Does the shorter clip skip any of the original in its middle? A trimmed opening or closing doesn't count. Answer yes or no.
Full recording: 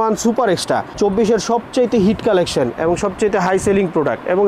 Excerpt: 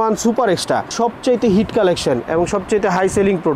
yes